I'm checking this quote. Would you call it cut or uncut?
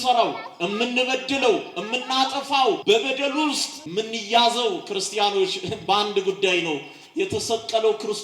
cut